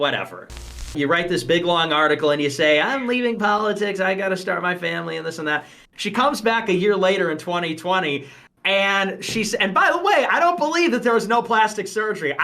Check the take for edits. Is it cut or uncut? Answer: cut